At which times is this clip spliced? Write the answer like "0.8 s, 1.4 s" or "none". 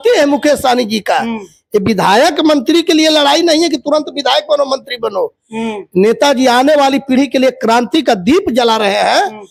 none